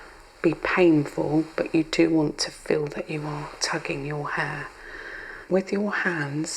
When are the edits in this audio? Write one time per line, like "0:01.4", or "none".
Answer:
0:05.4